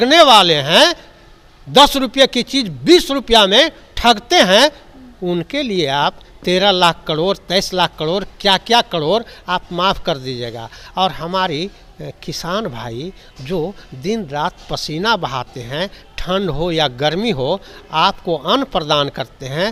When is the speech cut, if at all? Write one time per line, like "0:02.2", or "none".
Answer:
none